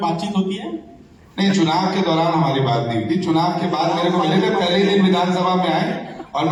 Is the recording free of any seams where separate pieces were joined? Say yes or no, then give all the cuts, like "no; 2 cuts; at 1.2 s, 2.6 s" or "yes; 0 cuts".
yes; 0 cuts